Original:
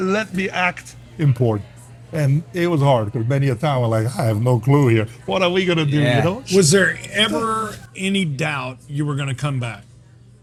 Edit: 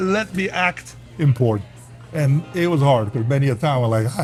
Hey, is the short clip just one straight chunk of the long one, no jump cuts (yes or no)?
yes